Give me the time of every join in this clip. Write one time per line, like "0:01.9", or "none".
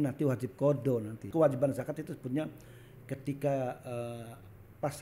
0:01.3